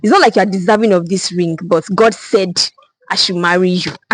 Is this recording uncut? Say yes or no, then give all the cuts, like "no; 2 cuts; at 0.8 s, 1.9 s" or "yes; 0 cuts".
yes; 0 cuts